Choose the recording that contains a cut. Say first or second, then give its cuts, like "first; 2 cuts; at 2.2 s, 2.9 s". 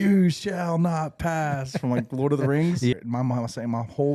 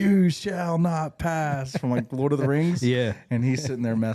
first; 1 cut; at 2.9 s